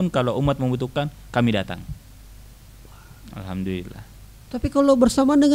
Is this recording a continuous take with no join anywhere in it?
yes; 0 cuts

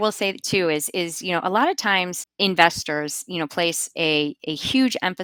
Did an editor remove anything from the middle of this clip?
no; 0 cuts

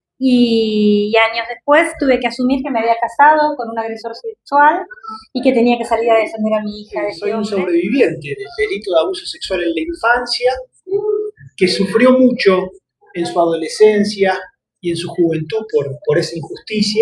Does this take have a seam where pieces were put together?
yes; 1 cut; at 7.2 s

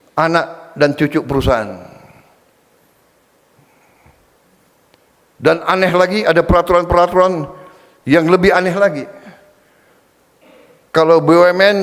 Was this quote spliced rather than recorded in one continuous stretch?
no; 0 cuts

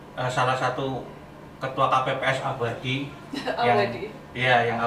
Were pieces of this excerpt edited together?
no; 0 cuts

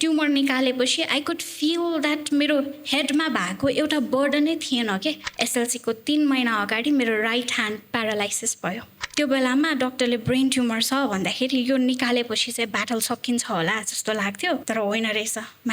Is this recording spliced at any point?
yes; 3 cuts; at 5.3 s, 8.9 s, 14.6 s

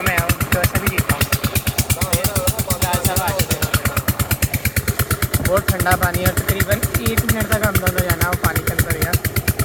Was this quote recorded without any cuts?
yes; 0 cuts

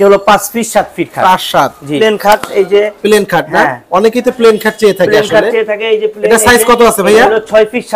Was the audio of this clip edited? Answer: yes; 1 cut; at 2.0 s

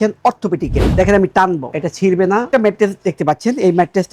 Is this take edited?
yes; 1 cut; at 2.5 s

